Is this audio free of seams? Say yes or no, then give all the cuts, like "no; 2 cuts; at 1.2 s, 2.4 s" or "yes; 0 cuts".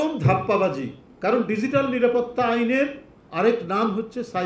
yes; 0 cuts